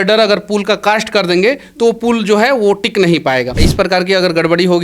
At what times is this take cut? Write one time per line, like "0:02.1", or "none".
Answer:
0:03.6